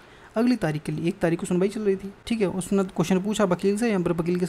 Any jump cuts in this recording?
yes; 1 cut; at 2.1 s

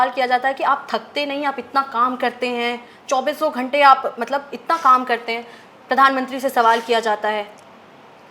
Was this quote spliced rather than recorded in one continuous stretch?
no; 0 cuts

